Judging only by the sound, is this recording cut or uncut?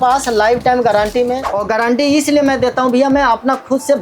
cut